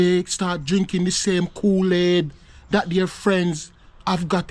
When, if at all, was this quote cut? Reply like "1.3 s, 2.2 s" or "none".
none